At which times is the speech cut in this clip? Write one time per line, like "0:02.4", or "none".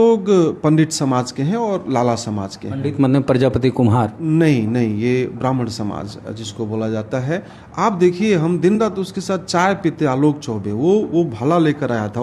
none